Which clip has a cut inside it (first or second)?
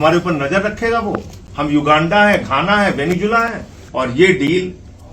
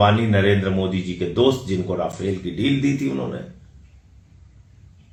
first